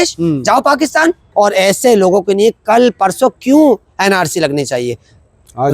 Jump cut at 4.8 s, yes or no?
no